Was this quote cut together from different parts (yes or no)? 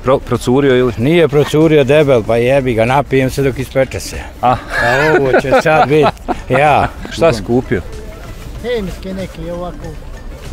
yes